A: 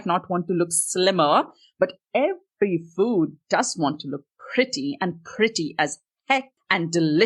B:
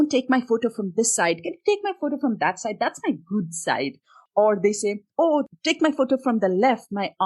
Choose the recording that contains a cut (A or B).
B